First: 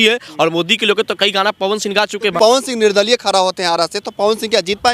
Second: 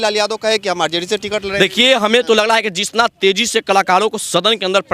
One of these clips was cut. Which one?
first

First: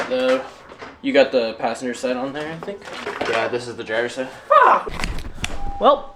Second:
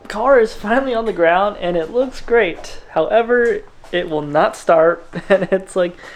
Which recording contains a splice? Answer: first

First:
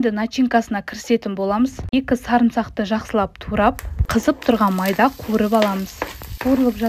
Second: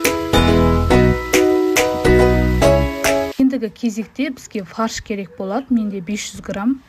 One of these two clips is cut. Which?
second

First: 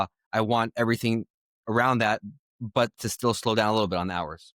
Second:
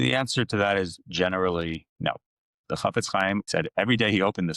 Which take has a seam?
second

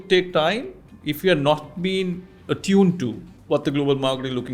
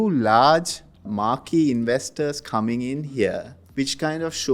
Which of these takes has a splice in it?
second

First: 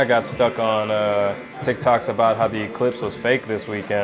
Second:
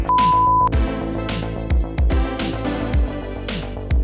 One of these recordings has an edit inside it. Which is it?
first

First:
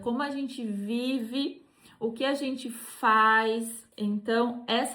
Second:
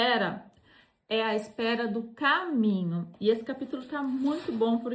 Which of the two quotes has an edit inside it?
first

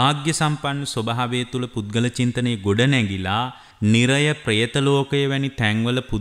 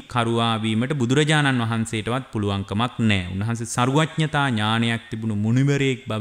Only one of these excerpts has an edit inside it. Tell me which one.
first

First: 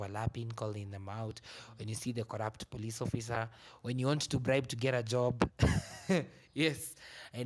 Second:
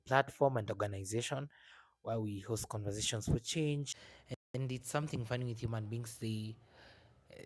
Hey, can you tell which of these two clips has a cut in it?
second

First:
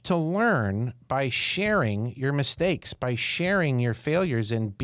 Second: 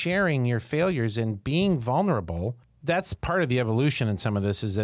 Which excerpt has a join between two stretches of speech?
second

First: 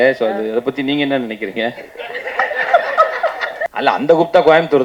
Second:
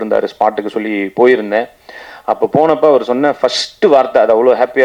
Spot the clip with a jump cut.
first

